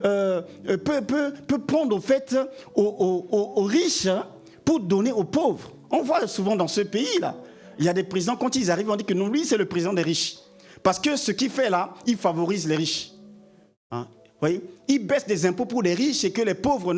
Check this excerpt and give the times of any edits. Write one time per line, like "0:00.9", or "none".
none